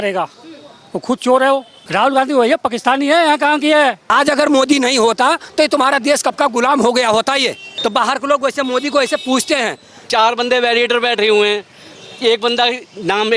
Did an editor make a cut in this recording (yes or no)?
yes